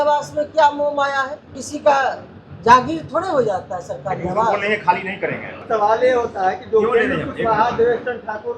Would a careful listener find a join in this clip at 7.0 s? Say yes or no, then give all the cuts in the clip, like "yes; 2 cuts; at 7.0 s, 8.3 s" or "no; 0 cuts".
no; 2 cuts; at 1.6 s, 5.6 s